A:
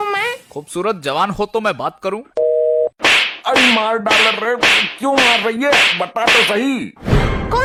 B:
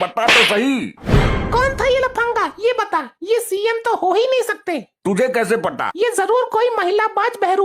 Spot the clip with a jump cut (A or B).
B